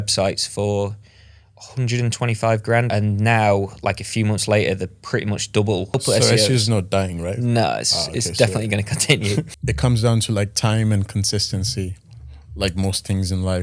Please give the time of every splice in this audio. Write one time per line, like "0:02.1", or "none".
0:02.9
0:06.0
0:09.6